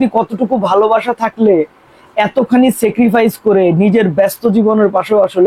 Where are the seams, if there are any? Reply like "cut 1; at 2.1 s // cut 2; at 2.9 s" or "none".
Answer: none

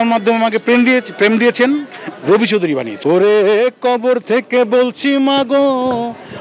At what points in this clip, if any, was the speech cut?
cut 1; at 2.9 s

